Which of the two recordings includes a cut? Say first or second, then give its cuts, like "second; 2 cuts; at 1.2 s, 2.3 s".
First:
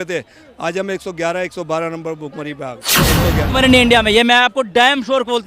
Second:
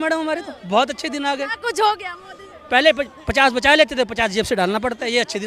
first; 1 cut; at 2.9 s